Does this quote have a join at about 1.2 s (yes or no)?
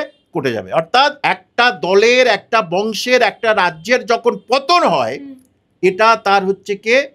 yes